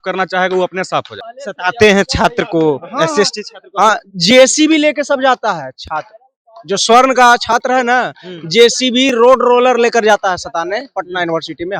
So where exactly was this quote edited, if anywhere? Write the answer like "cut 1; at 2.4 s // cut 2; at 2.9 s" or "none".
cut 1; at 1.1 s